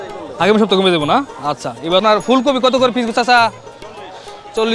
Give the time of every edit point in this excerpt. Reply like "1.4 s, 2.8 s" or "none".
2.0 s